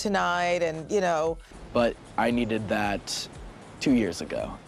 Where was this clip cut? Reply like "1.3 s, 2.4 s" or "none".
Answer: 1.5 s